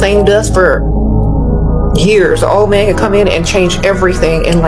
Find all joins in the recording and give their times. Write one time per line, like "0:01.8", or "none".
none